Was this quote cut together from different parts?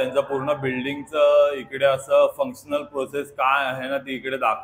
no; 0 cuts

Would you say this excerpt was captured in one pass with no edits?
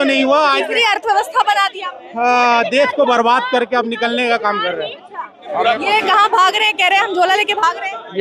yes; 0 cuts

